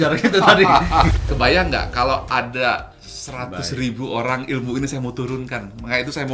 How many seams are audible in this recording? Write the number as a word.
one